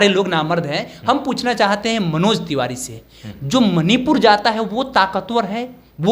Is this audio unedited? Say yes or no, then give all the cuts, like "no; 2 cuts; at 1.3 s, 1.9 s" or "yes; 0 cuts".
yes; 0 cuts